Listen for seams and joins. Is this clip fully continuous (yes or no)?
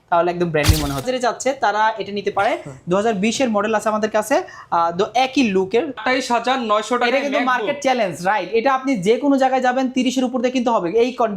no